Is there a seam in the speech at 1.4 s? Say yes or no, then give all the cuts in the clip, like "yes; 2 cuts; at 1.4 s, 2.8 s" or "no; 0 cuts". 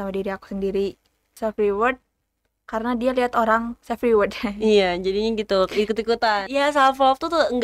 yes; 2 cuts; at 1.4 s, 6.4 s